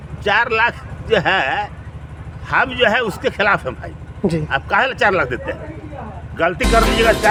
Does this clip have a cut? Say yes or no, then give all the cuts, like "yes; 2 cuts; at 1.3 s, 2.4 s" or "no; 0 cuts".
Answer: no; 0 cuts